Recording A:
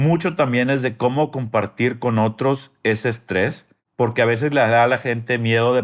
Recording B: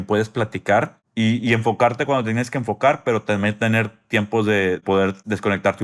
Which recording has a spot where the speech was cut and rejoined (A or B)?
B